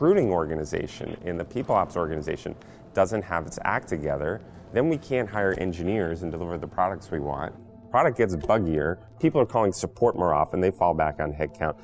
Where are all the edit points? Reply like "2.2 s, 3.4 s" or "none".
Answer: none